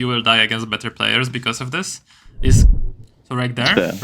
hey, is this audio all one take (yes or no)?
no